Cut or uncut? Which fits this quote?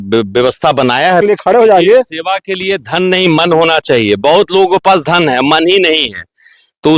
cut